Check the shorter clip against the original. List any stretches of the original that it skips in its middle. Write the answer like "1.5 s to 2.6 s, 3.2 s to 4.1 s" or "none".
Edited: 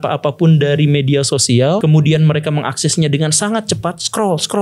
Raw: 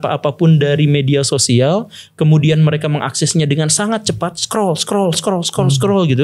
1.8 s to 2.2 s

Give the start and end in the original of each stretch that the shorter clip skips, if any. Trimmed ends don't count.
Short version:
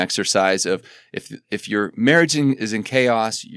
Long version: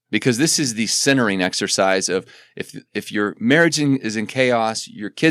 none

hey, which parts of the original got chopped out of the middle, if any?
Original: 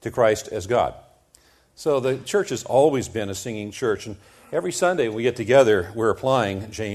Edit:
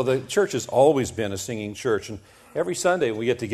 none

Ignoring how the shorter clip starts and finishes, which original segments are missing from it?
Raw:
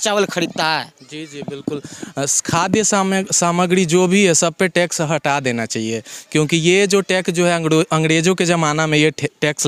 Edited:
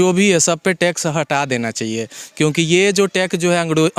none

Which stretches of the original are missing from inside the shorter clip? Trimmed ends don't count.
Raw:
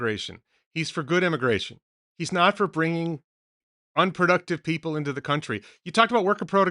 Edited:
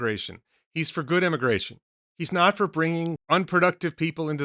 3.2 s to 3.9 s

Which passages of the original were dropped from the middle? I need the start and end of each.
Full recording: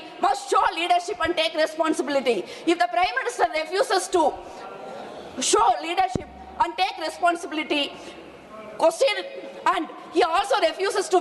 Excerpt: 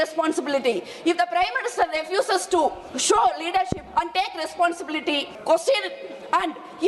4.5 s to 5.3 s, 6.2 s to 6.4 s, 8.0 s to 8.7 s

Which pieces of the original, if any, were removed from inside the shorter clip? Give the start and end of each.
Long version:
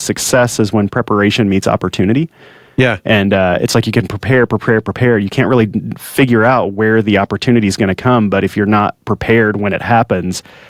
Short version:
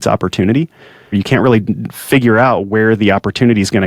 2.7 s to 5.2 s

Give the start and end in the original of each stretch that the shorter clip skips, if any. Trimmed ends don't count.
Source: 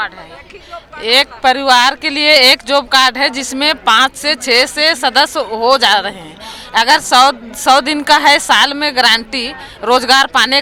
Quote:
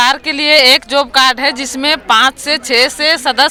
none

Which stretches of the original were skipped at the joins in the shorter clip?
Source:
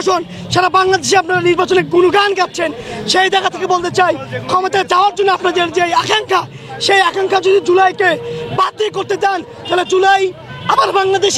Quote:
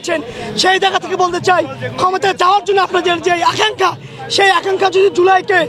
none

